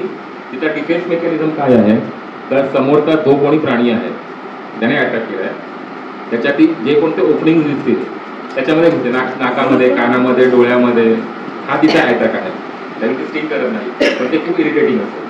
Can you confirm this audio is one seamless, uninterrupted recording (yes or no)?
yes